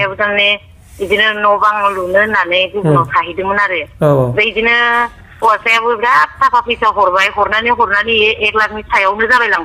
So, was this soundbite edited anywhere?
no; 0 cuts

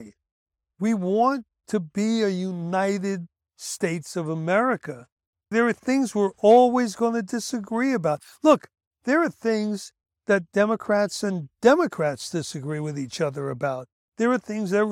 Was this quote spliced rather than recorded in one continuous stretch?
no; 0 cuts

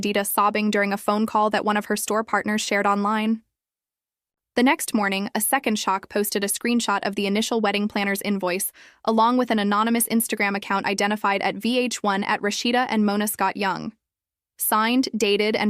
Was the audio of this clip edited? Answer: yes; 1 cut; at 13.3 s

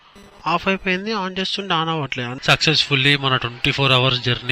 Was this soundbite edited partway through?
yes; 1 cut; at 2.3 s

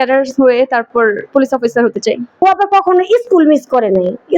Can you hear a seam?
yes; 1 cut; at 2.3 s

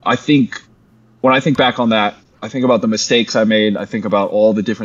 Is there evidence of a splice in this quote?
no; 0 cuts

